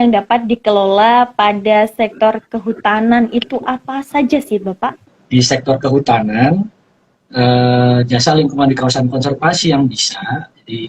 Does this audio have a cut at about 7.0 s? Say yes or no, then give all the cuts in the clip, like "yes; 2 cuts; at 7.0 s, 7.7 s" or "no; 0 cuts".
no; 1 cut; at 5.1 s